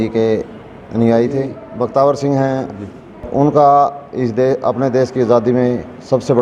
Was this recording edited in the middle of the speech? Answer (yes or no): yes